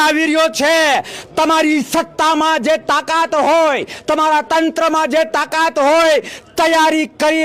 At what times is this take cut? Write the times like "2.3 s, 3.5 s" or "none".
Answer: none

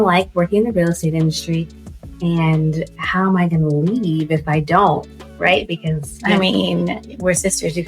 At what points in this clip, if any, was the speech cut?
none

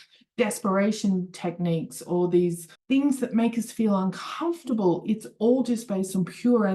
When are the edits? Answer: 2.7 s

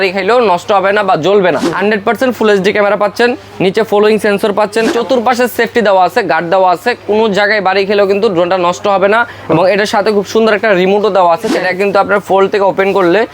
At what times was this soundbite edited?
1.7 s, 4.9 s, 11.5 s

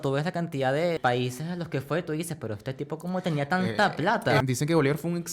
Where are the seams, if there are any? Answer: 1.0 s, 4.4 s

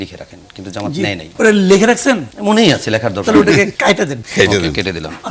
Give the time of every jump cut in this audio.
1.3 s, 2.3 s, 4.0 s

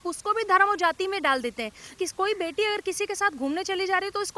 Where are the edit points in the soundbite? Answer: 2.0 s

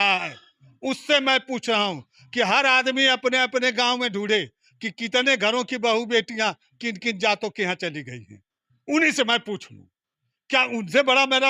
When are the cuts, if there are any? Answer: none

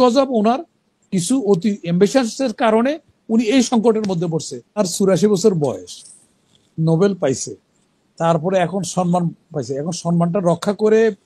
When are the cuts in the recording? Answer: 4.8 s

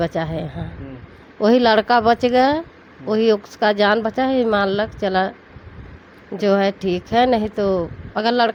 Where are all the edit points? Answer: none

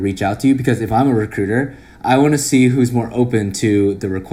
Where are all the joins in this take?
none

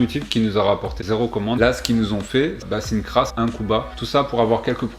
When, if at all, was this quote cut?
1.0 s

